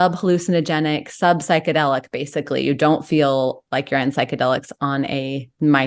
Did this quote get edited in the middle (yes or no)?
no